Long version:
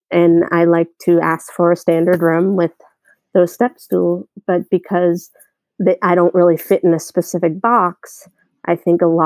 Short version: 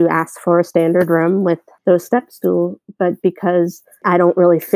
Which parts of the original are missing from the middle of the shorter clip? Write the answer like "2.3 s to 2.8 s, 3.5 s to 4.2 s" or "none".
2.8 s to 3.2 s, 5.5 s to 6.0 s